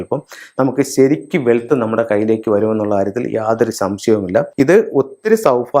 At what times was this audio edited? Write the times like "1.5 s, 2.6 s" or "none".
4.5 s

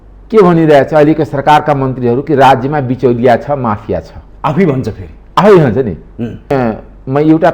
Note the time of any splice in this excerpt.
6.5 s

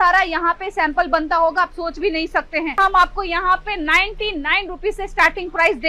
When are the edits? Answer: 2.8 s

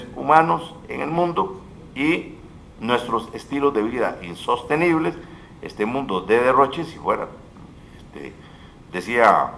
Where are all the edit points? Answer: none

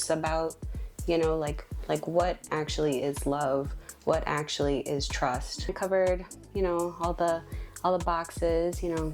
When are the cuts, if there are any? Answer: 5.7 s

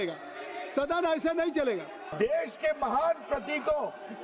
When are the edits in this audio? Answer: 2.1 s

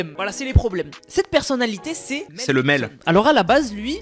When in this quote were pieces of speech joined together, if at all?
none

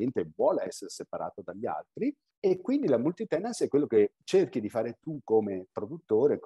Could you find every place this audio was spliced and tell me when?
2.3 s, 4.2 s

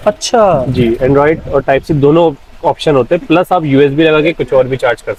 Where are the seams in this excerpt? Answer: none

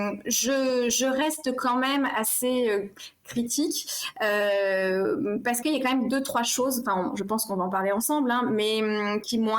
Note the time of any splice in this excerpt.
none

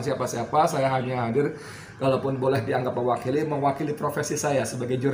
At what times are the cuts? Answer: none

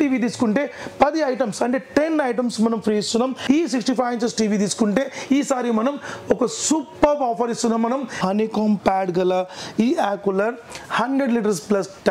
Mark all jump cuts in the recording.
3.4 s, 8.2 s

